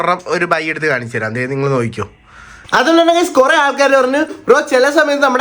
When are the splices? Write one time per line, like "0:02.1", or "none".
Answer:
0:02.5

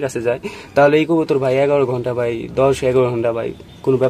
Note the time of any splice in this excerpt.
none

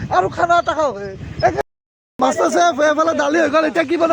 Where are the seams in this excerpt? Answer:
0:01.7

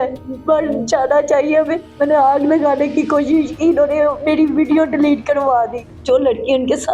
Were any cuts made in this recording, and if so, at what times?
0:01.8
0:05.9

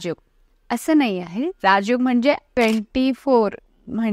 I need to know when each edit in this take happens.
0:02.6

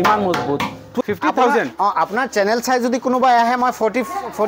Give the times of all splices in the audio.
0:01.0

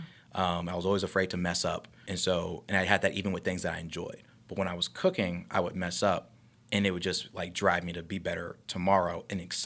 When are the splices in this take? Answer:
0:02.0

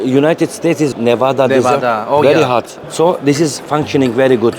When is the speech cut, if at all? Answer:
0:00.9
0:02.7
0:03.6

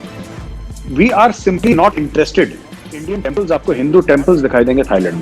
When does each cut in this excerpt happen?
0:03.2

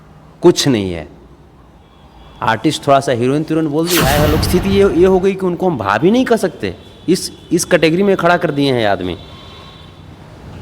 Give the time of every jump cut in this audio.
0:04.4

